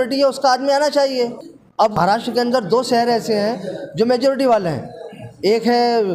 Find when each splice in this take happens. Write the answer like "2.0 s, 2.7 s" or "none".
2.0 s